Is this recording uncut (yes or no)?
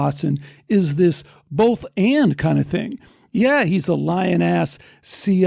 yes